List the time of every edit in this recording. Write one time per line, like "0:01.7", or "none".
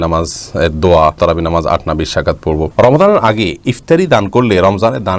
0:01.2
0:02.7